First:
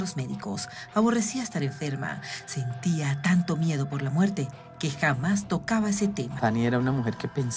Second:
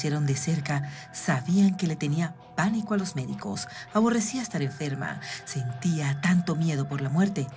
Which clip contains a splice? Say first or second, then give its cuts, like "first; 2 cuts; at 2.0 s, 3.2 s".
first; 1 cut; at 6.3 s